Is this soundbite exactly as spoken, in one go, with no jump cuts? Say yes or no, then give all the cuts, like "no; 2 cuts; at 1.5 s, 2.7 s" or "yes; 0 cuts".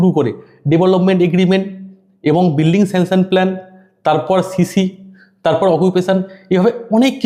yes; 0 cuts